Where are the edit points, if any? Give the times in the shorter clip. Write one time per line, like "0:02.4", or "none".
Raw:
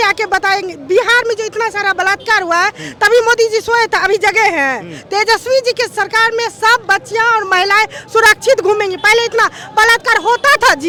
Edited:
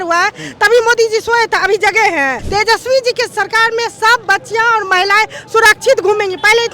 0:02.4